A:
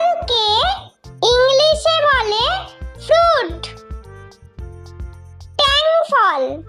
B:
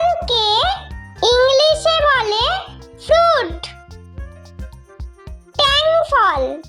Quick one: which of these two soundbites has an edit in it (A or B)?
A